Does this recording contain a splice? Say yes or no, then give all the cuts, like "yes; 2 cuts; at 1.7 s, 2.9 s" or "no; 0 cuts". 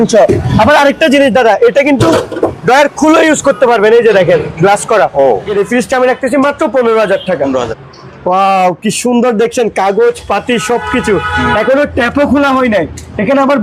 yes; 2 cuts; at 5.5 s, 7.8 s